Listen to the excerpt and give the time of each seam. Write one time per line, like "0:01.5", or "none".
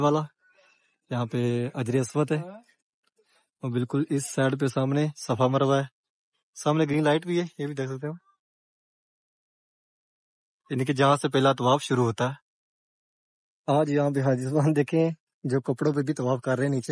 none